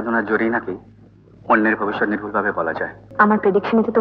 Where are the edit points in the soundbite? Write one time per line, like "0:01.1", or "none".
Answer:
0:03.0